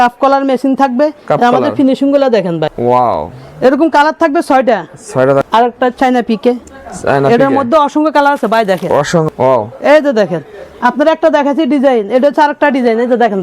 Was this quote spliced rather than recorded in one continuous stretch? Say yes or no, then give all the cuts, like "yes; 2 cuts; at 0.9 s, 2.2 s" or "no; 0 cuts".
yes; 3 cuts; at 2.7 s, 5.4 s, 9.3 s